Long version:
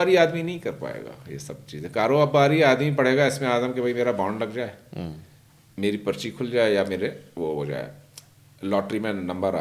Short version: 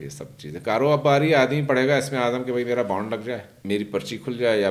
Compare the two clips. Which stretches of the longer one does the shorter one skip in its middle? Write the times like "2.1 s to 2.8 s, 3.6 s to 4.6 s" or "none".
4.8 s to 5.6 s